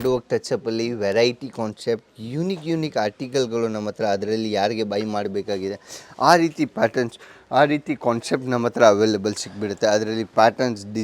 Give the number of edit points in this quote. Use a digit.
0